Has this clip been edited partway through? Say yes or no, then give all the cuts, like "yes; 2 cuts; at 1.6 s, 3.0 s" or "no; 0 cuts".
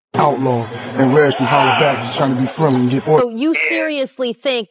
yes; 1 cut; at 3.2 s